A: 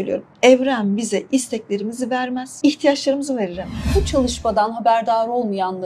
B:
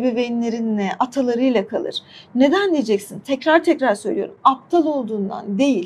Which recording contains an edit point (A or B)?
A